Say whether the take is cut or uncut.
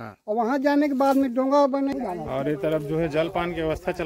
cut